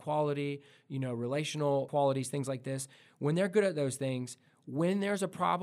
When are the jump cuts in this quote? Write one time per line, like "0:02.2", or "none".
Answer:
0:01.9